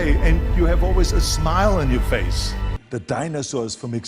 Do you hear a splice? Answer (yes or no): yes